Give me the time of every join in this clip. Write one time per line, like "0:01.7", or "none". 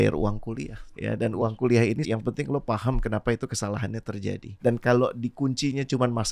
0:00.9
0:02.0
0:04.5

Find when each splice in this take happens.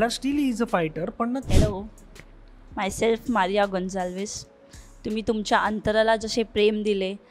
0:01.5

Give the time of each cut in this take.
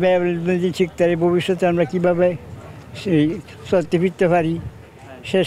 none

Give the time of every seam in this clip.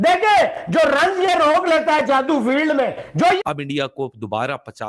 0:03.4

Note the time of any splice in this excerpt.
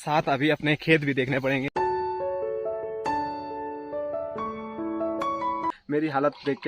0:01.7
0:05.7

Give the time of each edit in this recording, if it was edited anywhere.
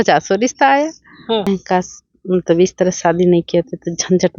0:01.5

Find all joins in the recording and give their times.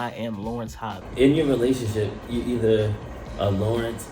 0:00.9

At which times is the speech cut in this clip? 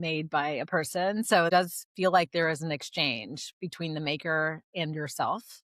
0:01.5

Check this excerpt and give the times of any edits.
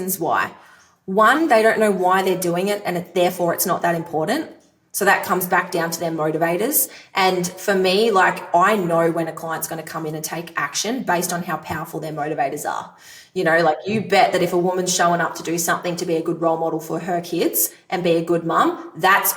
none

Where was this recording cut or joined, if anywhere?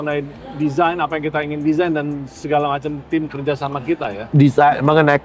none

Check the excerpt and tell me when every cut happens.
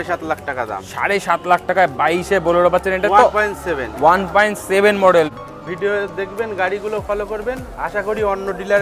0:05.3

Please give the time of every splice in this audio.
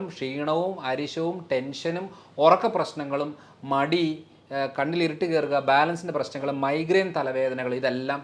none

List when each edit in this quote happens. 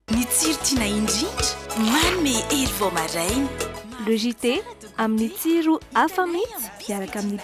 none

